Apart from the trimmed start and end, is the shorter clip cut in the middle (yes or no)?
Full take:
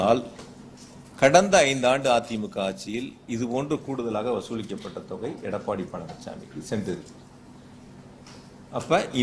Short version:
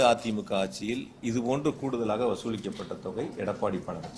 no